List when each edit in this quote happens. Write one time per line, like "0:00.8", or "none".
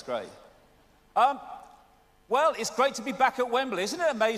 none